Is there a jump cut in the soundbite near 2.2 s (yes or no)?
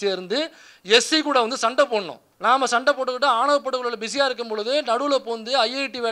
yes